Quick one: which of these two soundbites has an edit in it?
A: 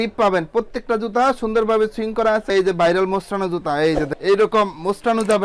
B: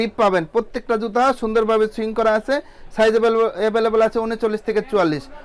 A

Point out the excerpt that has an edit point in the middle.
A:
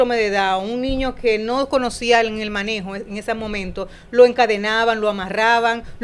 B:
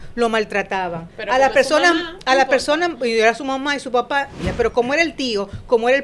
B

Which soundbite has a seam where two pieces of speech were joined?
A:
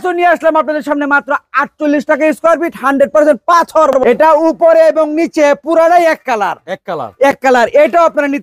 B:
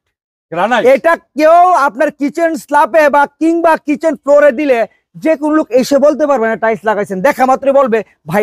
A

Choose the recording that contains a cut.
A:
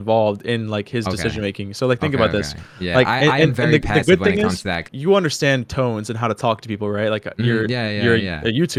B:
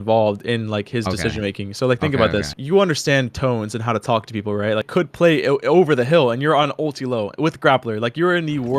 B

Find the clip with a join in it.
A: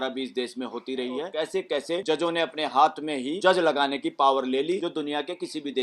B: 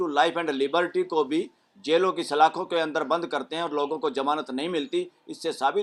A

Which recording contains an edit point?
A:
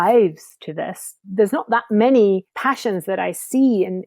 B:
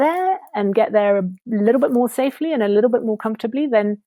A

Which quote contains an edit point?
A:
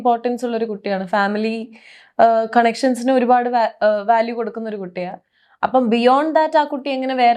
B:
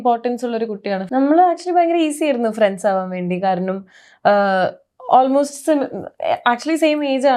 B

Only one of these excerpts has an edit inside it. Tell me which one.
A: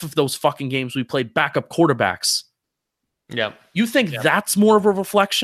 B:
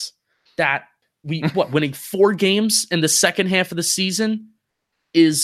B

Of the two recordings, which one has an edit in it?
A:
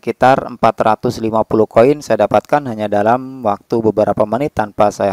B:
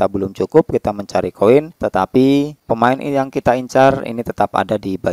B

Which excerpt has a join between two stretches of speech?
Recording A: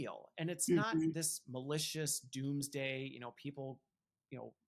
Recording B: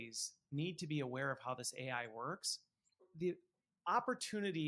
B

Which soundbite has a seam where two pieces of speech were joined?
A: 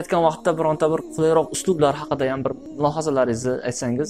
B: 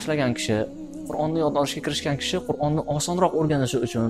A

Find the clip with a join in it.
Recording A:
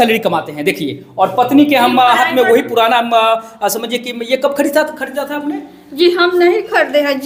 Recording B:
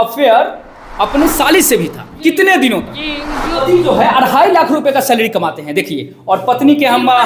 B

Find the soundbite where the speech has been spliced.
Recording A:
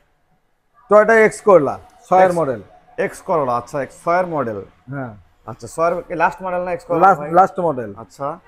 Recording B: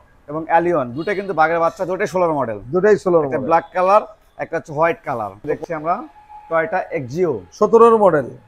B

